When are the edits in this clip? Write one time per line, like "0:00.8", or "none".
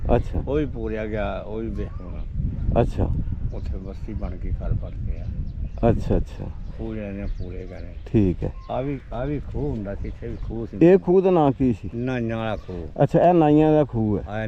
none